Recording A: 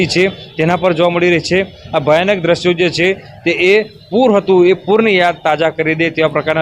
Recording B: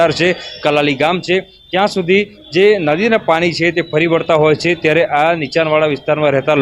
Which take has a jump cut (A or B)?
B